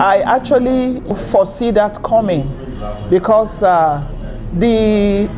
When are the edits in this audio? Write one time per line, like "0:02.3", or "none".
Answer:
0:01.1